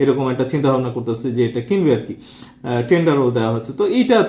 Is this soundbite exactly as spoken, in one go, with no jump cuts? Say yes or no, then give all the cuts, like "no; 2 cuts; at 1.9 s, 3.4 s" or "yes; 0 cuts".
yes; 0 cuts